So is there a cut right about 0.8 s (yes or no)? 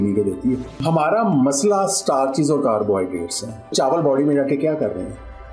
yes